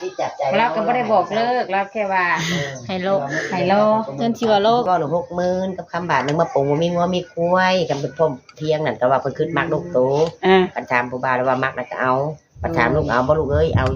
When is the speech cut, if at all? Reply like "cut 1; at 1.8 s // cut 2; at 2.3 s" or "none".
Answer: cut 1; at 4.9 s